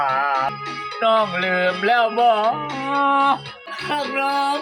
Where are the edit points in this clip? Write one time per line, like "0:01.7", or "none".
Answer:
0:00.9
0:03.9